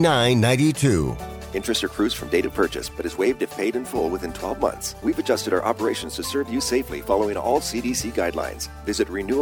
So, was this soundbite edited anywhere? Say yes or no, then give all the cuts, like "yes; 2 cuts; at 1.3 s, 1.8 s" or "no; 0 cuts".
yes; 1 cut; at 4.9 s